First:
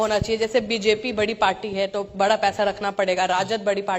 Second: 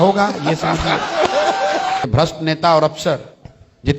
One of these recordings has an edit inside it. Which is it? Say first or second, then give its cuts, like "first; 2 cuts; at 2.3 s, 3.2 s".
second; 1 cut; at 2.0 s